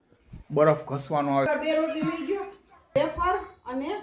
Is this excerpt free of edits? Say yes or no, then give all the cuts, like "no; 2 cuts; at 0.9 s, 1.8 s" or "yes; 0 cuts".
no; 2 cuts; at 1.5 s, 2.9 s